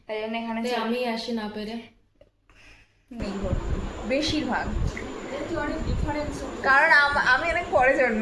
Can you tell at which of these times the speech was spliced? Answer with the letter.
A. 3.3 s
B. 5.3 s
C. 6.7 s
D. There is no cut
A